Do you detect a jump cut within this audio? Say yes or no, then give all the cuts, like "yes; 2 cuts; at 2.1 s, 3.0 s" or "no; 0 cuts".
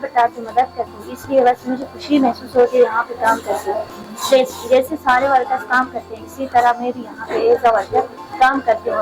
no; 0 cuts